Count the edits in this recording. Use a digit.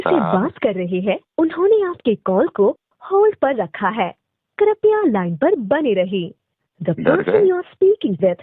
0